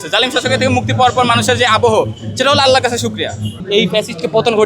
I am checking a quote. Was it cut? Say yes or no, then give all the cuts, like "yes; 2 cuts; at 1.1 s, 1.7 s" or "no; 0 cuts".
yes; 1 cut; at 3.6 s